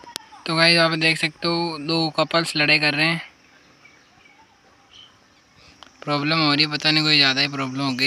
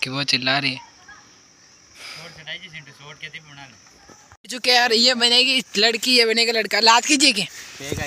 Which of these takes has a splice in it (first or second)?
second